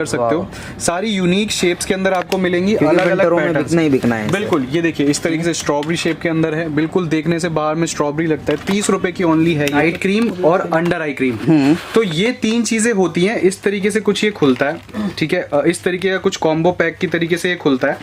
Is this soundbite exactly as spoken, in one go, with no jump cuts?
no; 1 cut; at 9.8 s

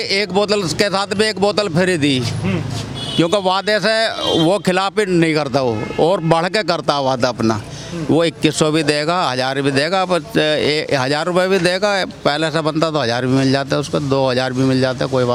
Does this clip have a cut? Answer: no; 0 cuts

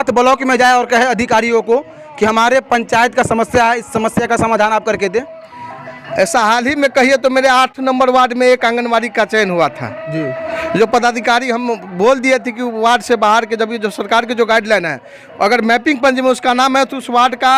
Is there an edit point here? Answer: no; 0 cuts

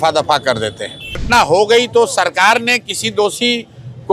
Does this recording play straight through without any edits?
no; 1 cut; at 1.2 s

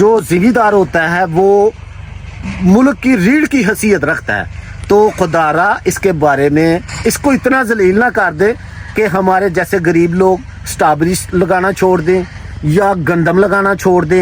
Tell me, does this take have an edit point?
no; 0 cuts

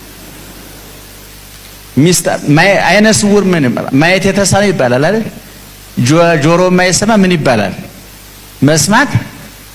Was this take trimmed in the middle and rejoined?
no; 0 cuts

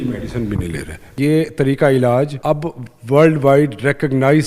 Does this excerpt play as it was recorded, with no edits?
no; 2 cuts; at 1.2 s, 2.3 s

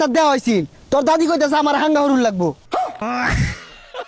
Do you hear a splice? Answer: yes; 1 cut; at 2.8 s

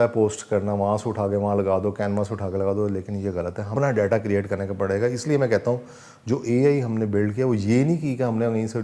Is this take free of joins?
no; 1 cut; at 3.7 s

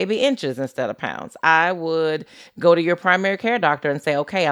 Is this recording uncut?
yes; 0 cuts

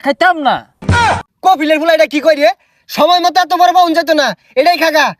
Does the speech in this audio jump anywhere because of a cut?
yes; 1 cut; at 0.9 s

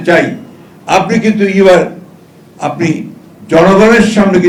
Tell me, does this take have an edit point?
no; 0 cuts

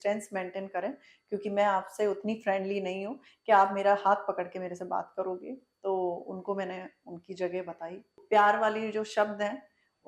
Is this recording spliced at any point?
yes; 1 cut; at 8.2 s

